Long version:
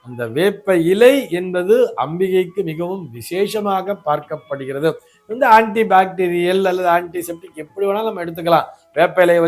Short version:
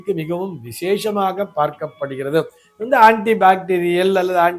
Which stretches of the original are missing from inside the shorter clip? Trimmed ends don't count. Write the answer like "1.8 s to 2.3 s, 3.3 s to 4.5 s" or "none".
none